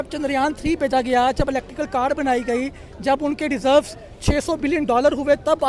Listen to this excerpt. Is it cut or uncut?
uncut